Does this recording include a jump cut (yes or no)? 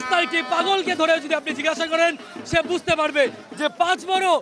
no